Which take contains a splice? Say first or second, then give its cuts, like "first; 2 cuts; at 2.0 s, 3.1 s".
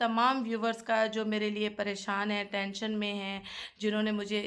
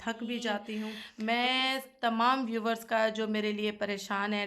second; 1 cut; at 1.0 s